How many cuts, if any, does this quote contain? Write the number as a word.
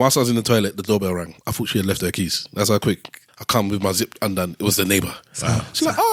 one